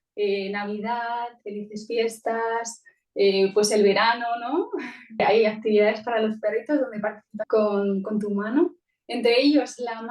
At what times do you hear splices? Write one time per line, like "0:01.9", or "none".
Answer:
0:05.2
0:07.3